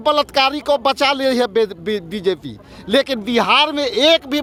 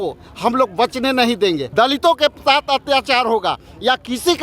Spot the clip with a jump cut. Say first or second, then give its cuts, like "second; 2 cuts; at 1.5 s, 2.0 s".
second; 1 cut; at 1.7 s